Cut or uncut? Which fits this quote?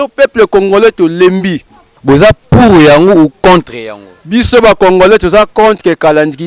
cut